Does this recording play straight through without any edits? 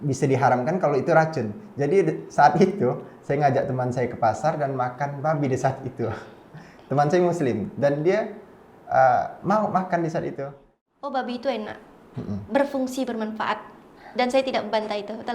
no; 1 cut; at 10.7 s

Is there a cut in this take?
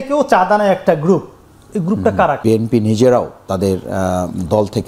yes; 1 cut; at 2.4 s

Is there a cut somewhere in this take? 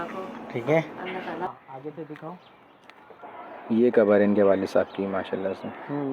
yes; 1 cut; at 1.5 s

